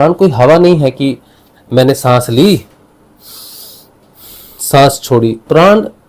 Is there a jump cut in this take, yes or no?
no